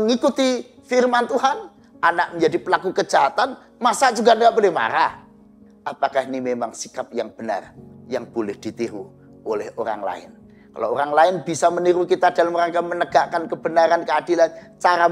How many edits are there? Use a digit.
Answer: 1